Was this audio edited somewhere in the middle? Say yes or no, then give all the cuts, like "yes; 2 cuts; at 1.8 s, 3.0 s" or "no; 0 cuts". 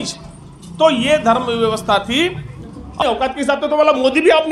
yes; 1 cut; at 3.0 s